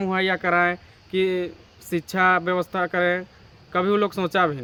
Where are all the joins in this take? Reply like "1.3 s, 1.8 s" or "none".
none